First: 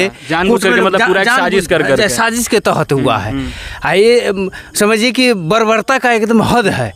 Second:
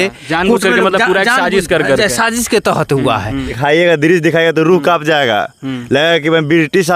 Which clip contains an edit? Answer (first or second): second